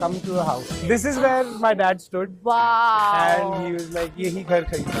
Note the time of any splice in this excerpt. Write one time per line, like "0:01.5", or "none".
0:04.1